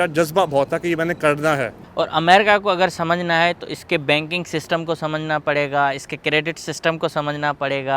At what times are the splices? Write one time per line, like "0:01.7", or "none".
0:01.8